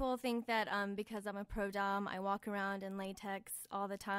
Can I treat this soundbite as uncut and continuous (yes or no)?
yes